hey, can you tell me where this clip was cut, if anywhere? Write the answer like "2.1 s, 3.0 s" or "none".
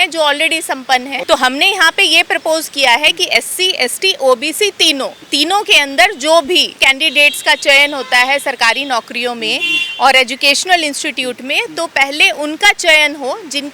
1.2 s, 5.2 s, 6.9 s